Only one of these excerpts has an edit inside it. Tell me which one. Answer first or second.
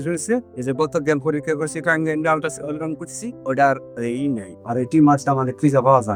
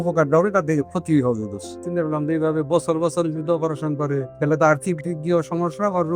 second